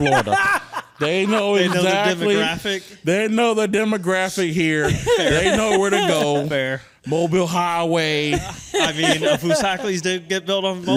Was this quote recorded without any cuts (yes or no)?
yes